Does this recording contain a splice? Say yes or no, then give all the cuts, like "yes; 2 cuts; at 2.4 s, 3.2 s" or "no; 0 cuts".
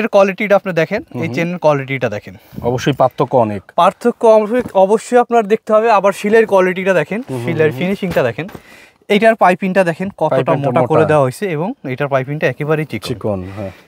no; 0 cuts